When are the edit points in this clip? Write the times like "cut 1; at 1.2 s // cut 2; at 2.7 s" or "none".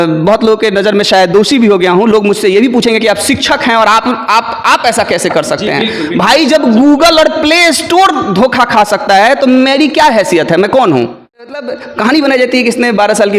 cut 1; at 11.5 s